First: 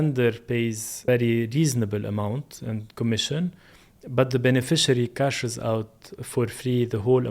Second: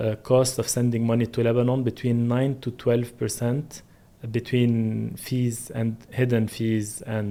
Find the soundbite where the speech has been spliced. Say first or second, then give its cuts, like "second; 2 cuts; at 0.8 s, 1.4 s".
first; 1 cut; at 1.0 s